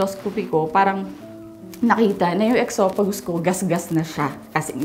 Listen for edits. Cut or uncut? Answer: uncut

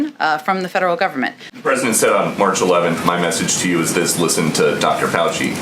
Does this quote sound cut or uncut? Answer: cut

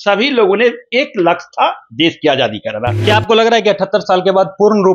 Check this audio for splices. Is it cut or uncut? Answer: cut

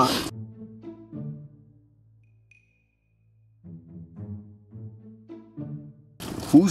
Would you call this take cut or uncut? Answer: uncut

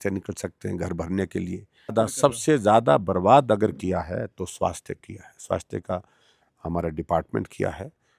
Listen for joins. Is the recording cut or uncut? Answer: cut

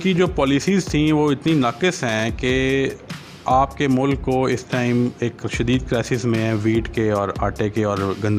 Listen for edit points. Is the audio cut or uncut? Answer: uncut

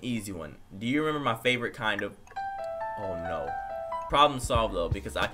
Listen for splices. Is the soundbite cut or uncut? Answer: cut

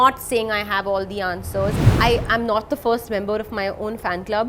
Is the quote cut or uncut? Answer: cut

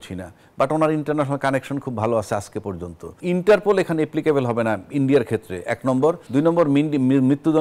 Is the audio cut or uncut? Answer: cut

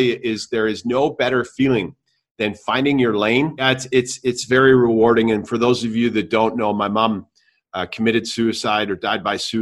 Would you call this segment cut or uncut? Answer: cut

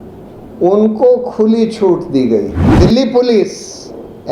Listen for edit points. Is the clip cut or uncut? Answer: cut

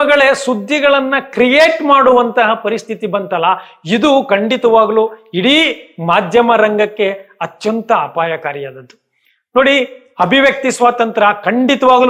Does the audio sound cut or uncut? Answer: uncut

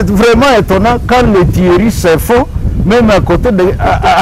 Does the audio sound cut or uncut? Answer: uncut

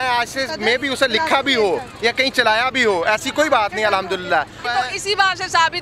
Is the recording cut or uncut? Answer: cut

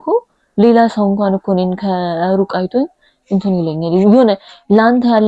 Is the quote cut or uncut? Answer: uncut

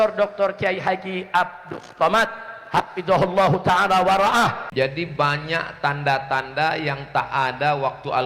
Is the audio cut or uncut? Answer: cut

